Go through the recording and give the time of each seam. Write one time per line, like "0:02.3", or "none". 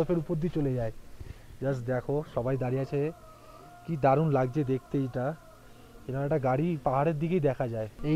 none

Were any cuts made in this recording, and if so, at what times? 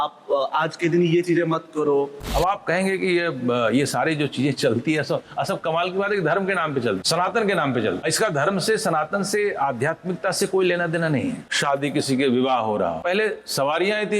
0:02.2
0:07.0
0:08.0
0:11.5
0:13.0

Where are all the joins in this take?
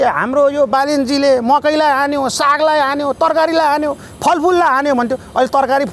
none

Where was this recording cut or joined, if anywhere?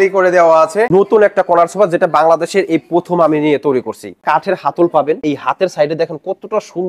0:00.9
0:04.2
0:05.2

